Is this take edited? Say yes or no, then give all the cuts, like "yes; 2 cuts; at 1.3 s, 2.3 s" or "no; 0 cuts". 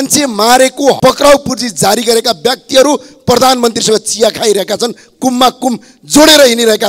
yes; 1 cut; at 1.0 s